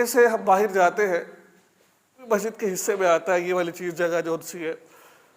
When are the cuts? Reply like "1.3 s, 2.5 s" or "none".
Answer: 2.3 s